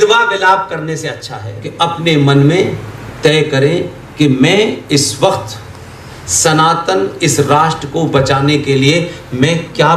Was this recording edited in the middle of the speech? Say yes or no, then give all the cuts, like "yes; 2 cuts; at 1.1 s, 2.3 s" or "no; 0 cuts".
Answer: yes; 1 cut; at 1.7 s